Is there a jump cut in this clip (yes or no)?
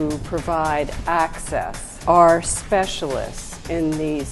yes